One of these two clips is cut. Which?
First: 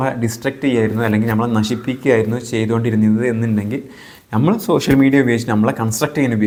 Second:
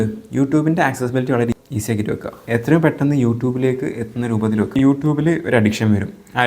second; 2 cuts; at 1.7 s, 4.8 s

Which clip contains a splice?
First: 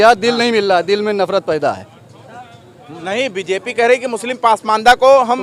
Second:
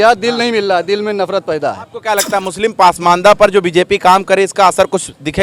second; 1 cut; at 1.9 s

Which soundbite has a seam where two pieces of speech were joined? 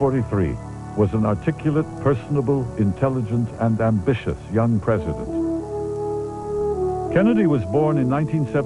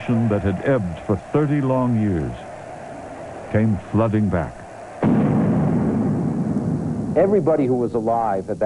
second; 1 cut; at 1.9 s

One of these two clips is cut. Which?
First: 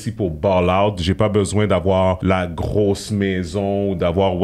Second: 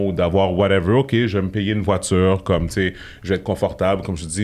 first; 1 cut; at 2.2 s

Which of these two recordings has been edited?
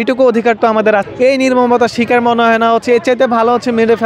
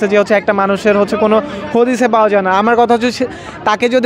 first; 1 cut; at 1.1 s

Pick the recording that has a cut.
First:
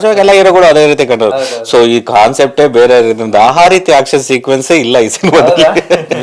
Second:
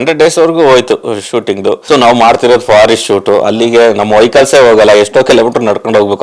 second; 1 cut; at 1.8 s

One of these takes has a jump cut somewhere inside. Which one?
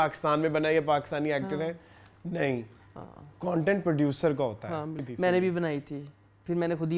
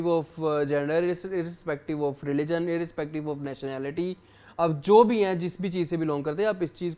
first; 1 cut; at 5.1 s

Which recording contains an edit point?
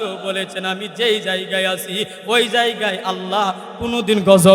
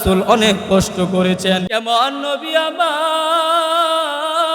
second; 1 cut; at 1.7 s

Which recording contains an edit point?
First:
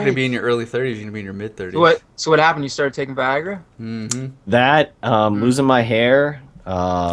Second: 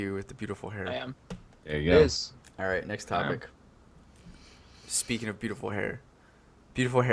second; 1 cut; at 1.0 s

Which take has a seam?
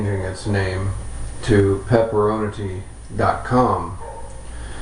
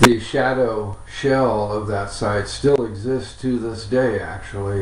first; 1 cut; at 1.4 s

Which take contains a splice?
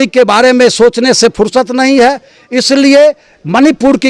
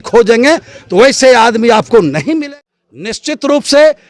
second; 1 cut; at 2.4 s

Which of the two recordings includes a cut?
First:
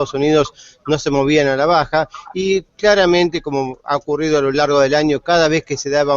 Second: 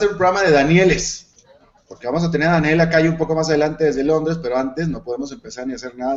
first; 1 cut; at 4.4 s

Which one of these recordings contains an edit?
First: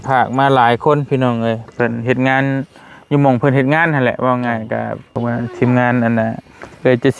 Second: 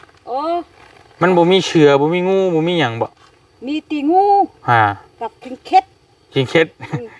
first; 1 cut; at 5.1 s

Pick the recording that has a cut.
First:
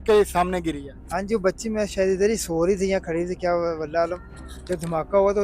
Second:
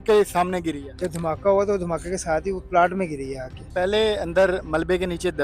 second; 2 cuts; at 0.9 s, 3.6 s

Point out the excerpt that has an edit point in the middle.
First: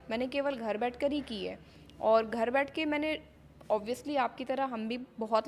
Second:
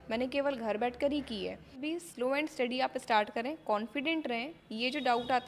second; 1 cut; at 1.8 s

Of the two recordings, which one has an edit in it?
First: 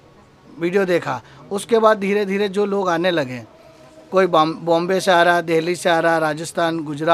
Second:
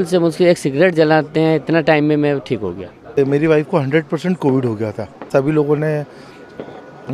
second; 2 cuts; at 3.2 s, 5.3 s

